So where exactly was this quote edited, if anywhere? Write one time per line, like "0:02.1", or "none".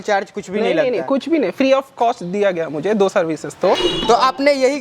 0:03.9